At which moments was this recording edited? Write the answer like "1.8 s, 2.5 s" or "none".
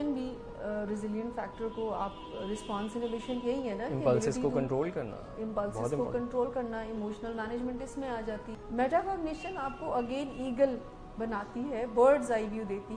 none